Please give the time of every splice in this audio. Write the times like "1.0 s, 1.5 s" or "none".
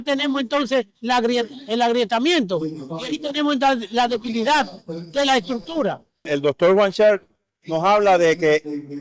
6.2 s